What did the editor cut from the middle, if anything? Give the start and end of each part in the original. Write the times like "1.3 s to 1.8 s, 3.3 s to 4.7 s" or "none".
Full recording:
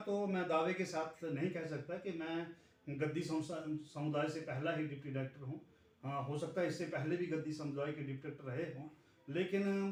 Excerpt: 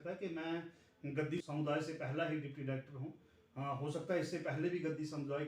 3.3 s to 3.9 s